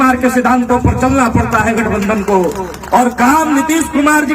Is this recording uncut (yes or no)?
yes